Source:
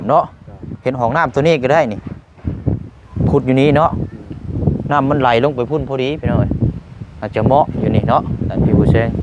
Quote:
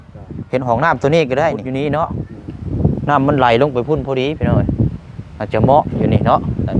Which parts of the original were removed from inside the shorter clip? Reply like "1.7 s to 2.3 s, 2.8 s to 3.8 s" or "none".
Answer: 2.0 s to 3.5 s